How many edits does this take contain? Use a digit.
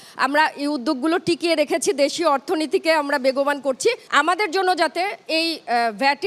1